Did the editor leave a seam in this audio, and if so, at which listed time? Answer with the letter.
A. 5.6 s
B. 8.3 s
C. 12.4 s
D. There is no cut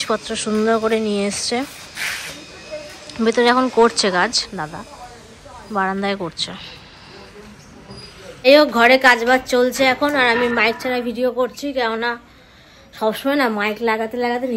D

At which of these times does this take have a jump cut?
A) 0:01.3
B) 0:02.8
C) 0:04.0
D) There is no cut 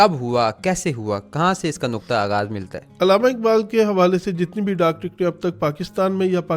B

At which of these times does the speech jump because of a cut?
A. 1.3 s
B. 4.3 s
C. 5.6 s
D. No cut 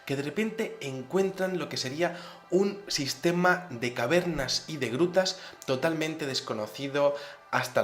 A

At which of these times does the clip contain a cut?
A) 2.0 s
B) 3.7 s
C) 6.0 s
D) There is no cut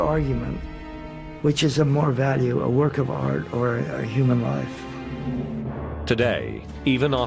C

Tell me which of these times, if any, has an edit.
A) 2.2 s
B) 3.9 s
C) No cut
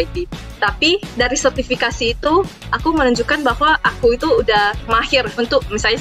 B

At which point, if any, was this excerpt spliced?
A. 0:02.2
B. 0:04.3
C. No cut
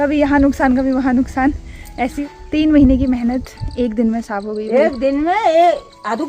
A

